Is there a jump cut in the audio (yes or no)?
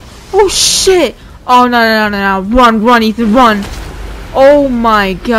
no